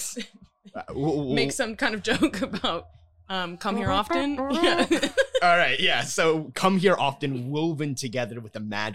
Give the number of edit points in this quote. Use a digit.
0